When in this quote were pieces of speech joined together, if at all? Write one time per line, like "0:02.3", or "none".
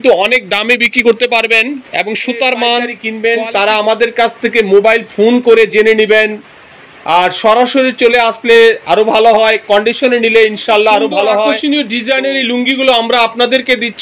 0:03.0
0:11.6